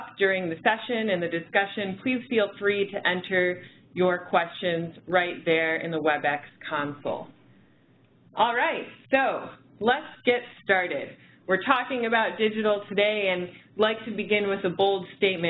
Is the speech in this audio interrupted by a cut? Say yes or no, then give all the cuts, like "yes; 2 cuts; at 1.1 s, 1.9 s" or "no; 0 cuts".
no; 0 cuts